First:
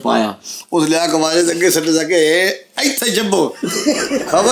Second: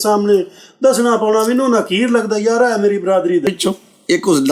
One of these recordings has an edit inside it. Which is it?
second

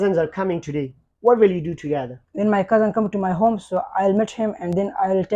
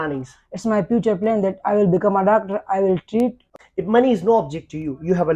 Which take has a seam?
second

